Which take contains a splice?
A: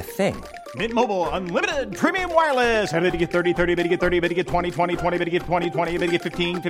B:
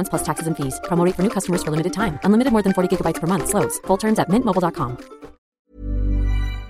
B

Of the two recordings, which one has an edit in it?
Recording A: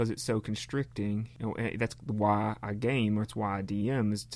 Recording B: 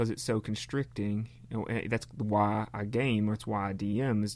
A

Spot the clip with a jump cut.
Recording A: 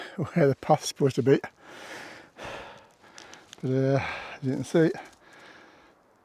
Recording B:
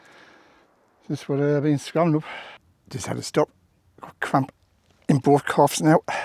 B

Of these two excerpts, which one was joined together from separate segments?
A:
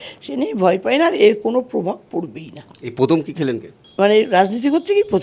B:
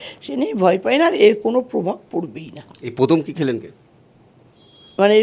A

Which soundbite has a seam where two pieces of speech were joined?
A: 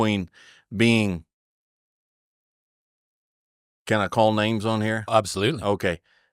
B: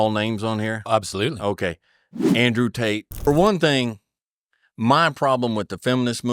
B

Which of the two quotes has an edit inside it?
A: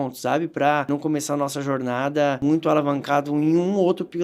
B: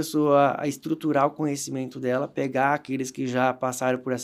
A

